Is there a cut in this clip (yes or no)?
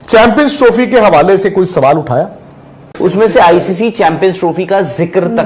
yes